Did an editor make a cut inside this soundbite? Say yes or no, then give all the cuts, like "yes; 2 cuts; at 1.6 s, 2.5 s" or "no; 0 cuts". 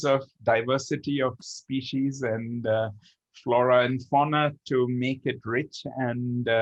no; 0 cuts